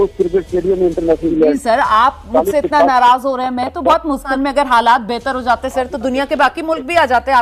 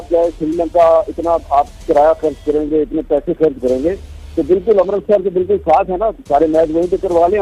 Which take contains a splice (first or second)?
first